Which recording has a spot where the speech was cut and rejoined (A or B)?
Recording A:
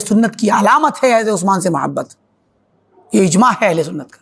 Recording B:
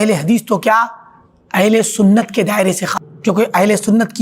B